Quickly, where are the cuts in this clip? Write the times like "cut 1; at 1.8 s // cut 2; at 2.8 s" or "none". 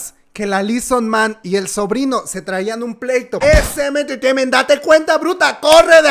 cut 1; at 3.3 s